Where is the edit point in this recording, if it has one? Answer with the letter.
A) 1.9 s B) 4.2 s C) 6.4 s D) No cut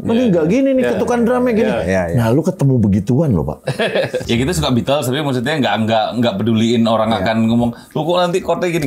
B